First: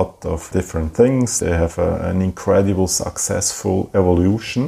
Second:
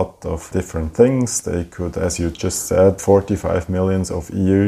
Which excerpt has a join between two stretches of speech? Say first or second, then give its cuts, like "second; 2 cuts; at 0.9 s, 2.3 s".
first; 1 cut; at 1.3 s